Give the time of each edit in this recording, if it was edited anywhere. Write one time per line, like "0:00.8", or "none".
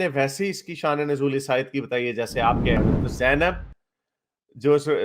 0:02.8